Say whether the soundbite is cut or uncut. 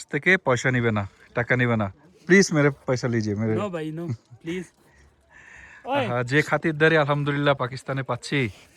uncut